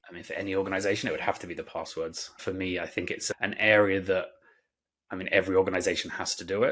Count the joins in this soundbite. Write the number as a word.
two